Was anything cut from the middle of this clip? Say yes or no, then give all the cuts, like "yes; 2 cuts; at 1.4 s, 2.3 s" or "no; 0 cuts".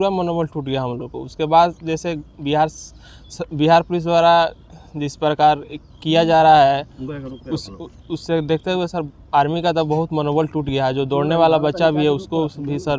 no; 0 cuts